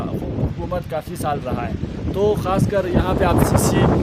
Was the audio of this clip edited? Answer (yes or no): no